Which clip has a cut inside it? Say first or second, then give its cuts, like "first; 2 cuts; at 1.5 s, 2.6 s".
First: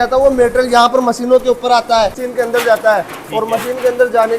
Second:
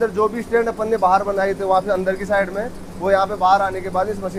first; 1 cut; at 2.2 s